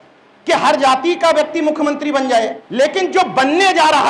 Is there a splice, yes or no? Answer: yes